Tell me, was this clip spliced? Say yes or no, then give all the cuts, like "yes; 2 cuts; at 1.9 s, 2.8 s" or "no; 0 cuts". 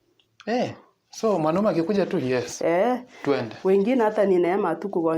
no; 0 cuts